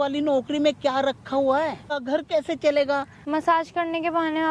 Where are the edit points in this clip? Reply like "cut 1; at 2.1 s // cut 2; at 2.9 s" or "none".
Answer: cut 1; at 1.9 s // cut 2; at 3.2 s